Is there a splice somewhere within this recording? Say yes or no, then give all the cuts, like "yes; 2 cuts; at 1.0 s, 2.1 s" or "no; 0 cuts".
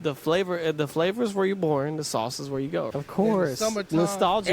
yes; 1 cut; at 2.9 s